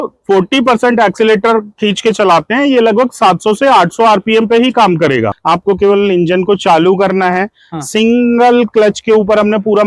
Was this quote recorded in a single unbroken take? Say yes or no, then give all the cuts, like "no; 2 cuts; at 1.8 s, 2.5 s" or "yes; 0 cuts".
no; 1 cut; at 5.4 s